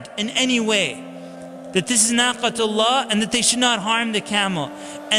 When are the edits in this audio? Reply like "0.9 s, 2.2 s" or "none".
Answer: none